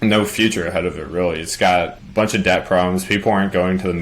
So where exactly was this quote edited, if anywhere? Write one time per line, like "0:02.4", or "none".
0:02.0

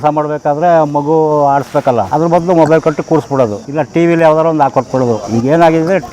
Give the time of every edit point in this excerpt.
0:02.1
0:03.7

